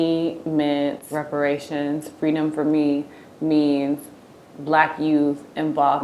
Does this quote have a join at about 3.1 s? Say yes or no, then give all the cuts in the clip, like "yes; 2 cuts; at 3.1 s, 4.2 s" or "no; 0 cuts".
no; 1 cut; at 1.0 s